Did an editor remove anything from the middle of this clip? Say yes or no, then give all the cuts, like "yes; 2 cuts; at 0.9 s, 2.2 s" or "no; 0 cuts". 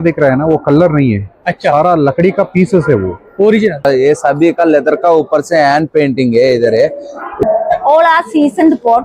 yes; 2 cuts; at 3.9 s, 7.4 s